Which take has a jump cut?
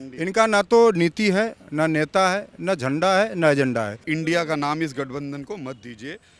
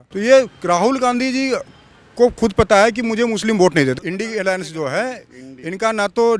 first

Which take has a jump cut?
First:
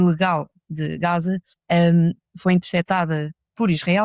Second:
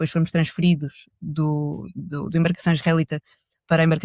first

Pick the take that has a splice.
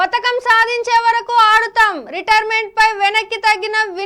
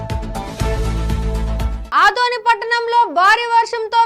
second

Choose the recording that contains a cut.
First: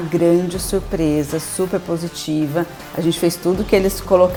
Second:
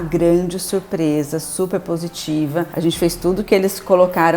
second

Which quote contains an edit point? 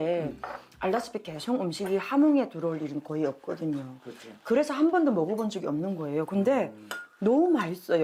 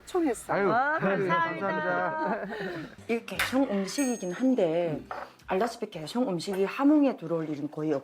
second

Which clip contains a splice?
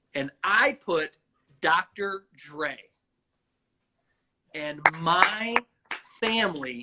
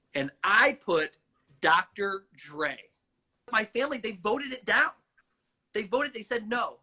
second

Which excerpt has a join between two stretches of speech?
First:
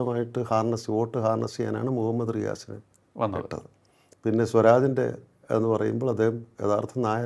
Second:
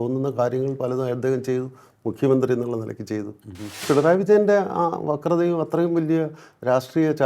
second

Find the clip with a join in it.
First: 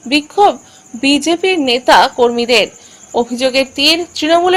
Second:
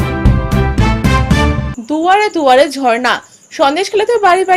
second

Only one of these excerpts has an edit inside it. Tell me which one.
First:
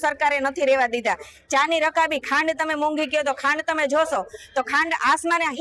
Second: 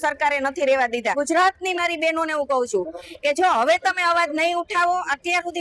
second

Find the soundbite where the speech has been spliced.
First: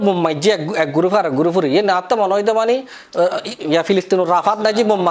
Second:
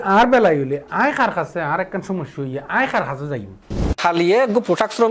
second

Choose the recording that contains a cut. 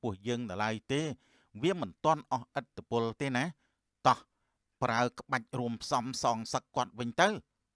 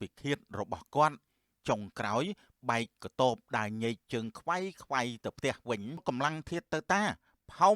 second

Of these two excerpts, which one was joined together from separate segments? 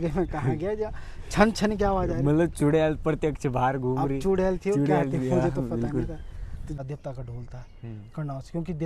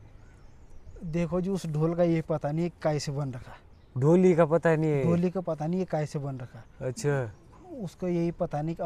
first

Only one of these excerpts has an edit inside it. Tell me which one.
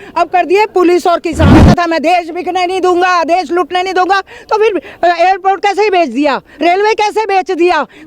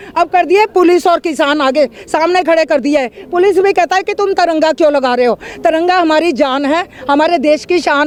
first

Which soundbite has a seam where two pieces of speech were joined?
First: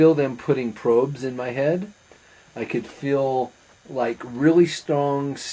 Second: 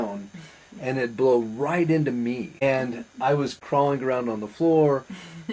second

